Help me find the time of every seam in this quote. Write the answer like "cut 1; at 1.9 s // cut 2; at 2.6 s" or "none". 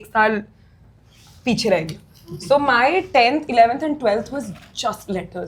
none